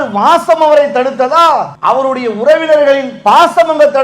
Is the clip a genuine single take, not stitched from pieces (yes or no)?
no